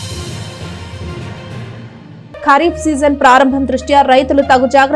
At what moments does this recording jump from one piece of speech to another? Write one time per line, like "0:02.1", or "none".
0:01.8